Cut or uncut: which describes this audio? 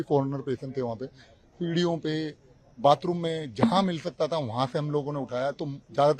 uncut